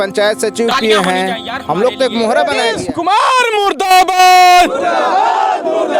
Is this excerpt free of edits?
no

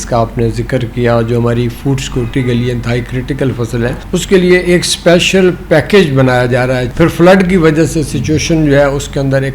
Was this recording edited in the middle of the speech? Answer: yes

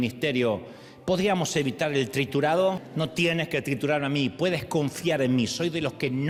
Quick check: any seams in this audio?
no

